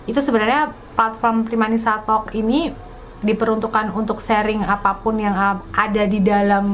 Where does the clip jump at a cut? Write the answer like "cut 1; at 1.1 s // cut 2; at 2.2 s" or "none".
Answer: none